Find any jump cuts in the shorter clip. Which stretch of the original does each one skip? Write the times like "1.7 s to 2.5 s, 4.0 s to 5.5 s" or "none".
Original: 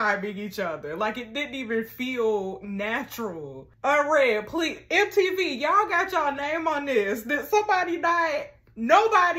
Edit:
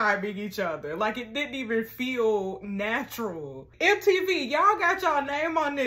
3.7 s to 4.8 s